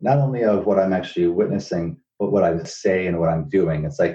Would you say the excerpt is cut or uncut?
cut